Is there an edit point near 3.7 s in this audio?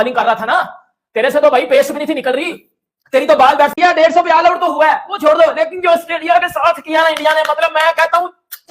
yes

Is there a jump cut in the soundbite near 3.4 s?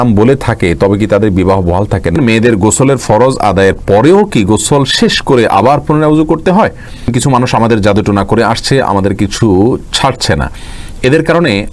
no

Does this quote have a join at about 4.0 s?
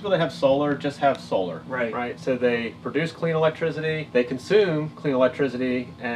yes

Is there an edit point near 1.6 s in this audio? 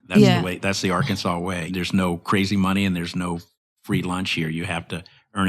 yes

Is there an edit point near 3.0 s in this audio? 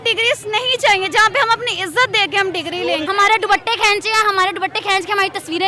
yes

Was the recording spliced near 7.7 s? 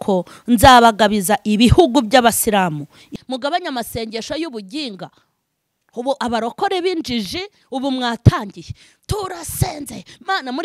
no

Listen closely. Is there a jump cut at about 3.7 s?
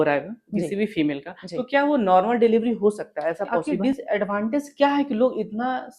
yes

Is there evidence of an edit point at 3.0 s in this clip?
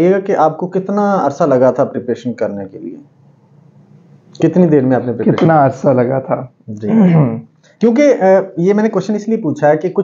no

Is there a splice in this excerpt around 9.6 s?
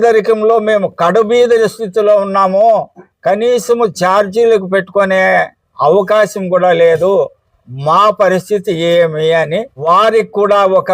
yes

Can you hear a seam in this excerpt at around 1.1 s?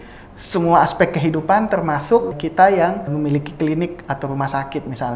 no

